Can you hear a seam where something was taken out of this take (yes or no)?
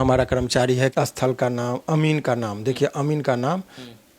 yes